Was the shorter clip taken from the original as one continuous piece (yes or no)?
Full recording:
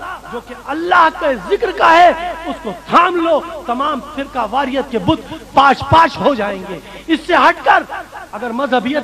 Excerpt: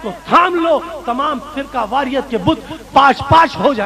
yes